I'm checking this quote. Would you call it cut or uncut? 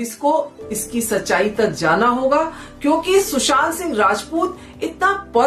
uncut